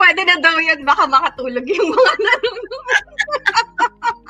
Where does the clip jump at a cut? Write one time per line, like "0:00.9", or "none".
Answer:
none